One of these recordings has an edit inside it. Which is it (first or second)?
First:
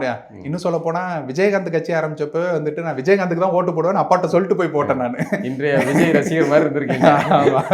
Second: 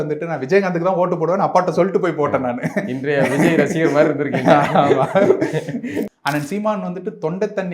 second